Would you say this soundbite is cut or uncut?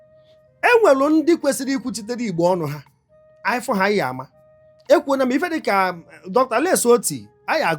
uncut